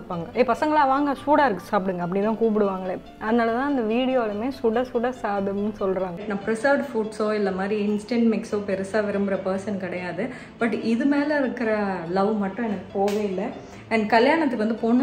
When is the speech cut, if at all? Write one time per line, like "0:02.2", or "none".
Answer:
0:06.2